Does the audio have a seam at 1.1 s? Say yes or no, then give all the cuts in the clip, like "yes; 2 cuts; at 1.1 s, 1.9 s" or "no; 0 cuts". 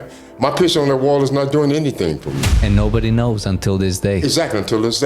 no; 1 cut; at 2.6 s